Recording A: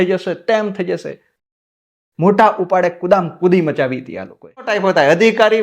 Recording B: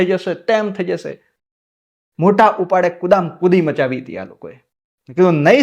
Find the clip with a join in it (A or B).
A